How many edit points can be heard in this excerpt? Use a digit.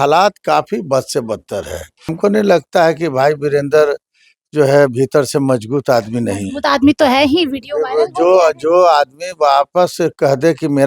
1